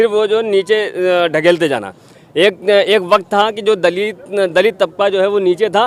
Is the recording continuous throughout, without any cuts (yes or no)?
yes